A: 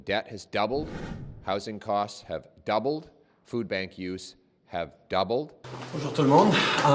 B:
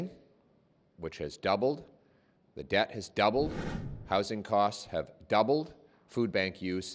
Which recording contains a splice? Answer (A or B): A